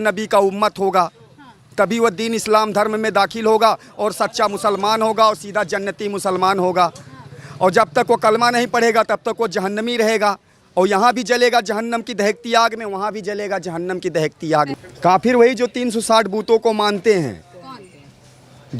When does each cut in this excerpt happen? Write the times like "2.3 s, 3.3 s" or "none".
14.7 s